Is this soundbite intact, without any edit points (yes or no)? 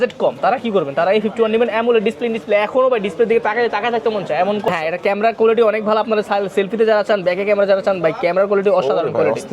no